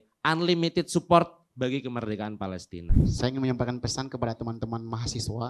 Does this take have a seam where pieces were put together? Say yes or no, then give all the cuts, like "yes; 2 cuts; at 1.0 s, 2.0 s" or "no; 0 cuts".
yes; 1 cut; at 3.0 s